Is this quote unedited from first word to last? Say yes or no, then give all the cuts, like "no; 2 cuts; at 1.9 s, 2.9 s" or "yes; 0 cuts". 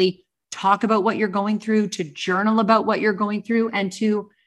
yes; 0 cuts